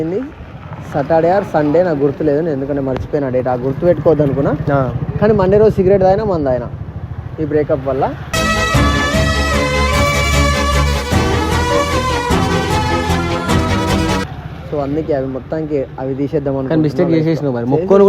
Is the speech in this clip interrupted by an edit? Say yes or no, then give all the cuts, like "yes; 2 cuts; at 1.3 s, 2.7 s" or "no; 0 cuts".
no; 0 cuts